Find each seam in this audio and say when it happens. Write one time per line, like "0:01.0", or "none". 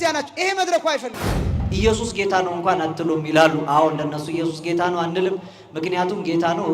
0:01.6